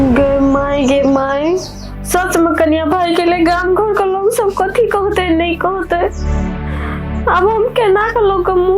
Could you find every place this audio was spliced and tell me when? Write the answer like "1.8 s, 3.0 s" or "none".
none